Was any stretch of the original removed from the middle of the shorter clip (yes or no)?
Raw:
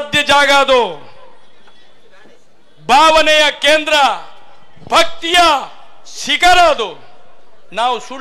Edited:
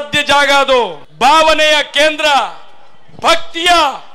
yes